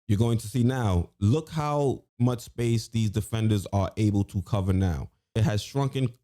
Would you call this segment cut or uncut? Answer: cut